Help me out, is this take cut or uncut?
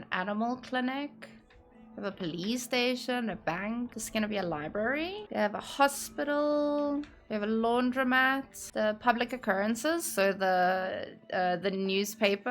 cut